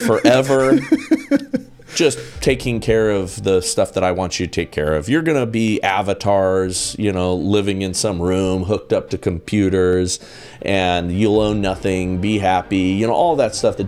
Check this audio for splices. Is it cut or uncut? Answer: uncut